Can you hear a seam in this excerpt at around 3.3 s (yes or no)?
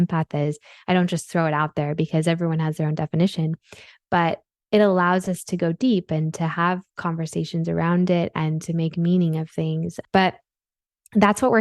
no